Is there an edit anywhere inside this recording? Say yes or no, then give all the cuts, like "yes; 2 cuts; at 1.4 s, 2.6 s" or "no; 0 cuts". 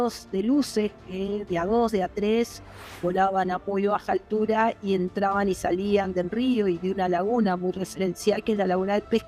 no; 0 cuts